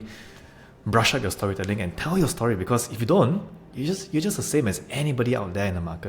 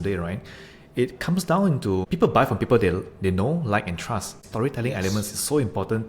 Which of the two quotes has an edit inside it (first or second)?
second